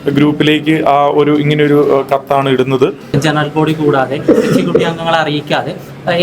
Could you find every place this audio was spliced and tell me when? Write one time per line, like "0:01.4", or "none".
0:03.1